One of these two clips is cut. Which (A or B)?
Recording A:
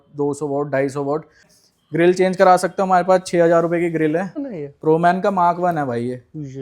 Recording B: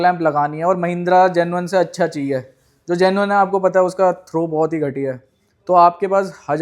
A